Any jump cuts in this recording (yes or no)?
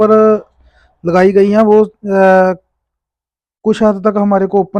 no